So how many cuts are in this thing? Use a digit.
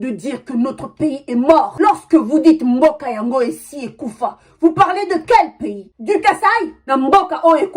1